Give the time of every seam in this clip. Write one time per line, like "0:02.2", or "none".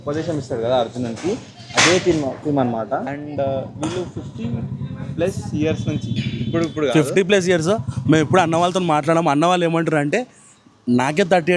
none